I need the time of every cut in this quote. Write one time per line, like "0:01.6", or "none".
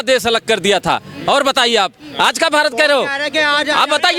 none